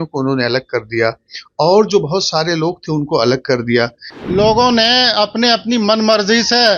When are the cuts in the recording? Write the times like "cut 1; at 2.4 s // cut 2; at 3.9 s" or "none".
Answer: cut 1; at 4.0 s